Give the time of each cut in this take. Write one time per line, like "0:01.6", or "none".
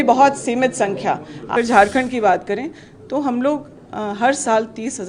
0:01.5